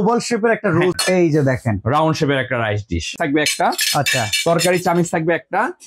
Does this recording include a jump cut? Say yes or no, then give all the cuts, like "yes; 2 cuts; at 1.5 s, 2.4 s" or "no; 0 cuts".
yes; 2 cuts; at 1.0 s, 3.1 s